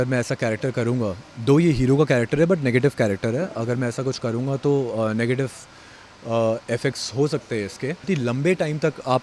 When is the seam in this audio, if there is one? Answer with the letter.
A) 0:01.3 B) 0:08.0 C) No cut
B